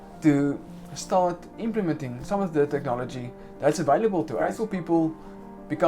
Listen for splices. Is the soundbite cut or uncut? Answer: cut